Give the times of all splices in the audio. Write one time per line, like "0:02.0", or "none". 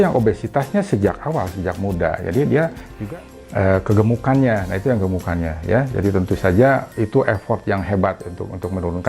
0:02.9